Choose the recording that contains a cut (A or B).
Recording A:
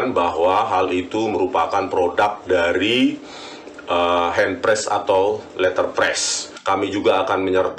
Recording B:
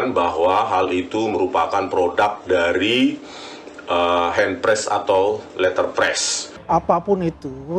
B